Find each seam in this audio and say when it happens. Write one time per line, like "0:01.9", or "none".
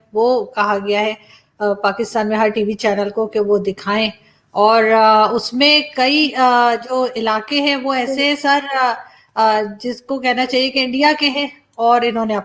none